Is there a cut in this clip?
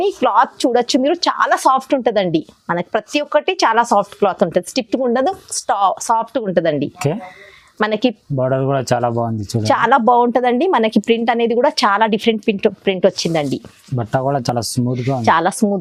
no; 0 cuts

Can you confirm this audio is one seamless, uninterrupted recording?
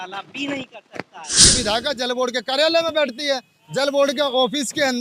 no; 1 cut; at 1.5 s

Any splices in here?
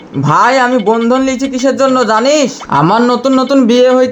yes; 1 cut; at 2.6 s

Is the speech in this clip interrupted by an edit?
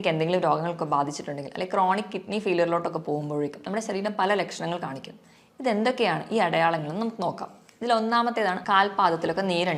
yes; 1 cut; at 8.6 s

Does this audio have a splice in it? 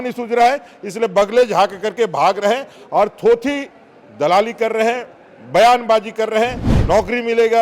yes; 1 cut; at 6.7 s

